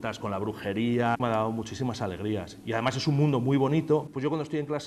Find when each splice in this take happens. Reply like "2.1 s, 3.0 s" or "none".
1.2 s, 4.1 s